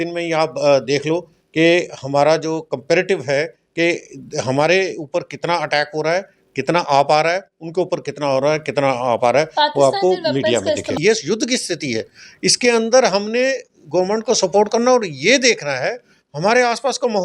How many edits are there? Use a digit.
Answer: 1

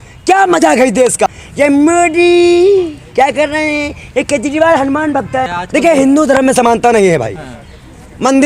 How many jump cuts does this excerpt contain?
2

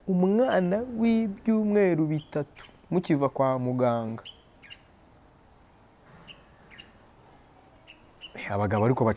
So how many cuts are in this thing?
0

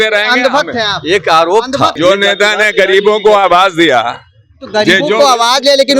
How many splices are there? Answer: 1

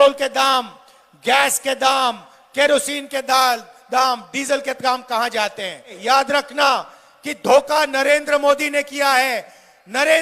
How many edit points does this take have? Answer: 1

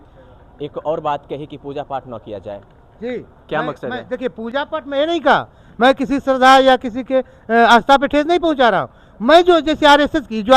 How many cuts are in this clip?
0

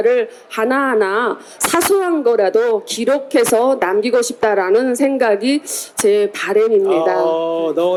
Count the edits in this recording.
0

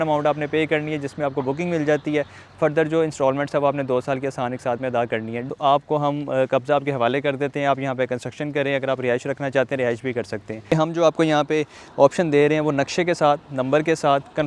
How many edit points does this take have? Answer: 2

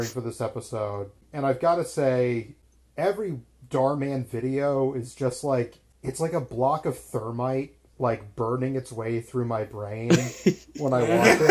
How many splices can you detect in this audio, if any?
3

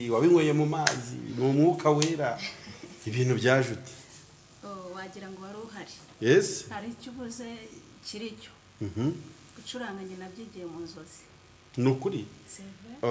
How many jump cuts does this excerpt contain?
0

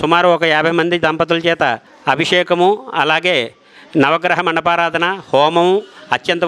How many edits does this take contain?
1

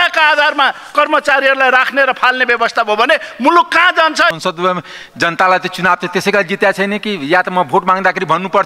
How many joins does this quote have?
1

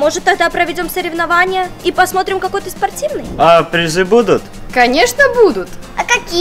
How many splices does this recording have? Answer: 1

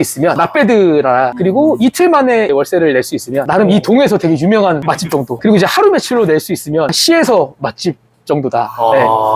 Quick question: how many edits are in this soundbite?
0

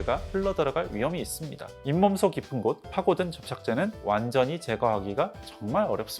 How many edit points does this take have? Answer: 2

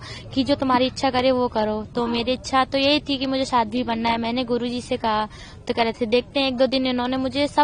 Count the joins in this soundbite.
0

